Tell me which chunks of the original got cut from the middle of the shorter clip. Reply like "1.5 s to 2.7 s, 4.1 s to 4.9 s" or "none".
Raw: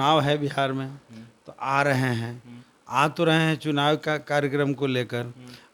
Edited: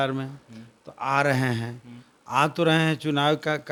none